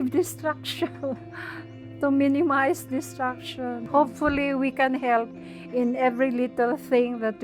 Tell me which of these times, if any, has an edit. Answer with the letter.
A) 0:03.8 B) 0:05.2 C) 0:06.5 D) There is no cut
A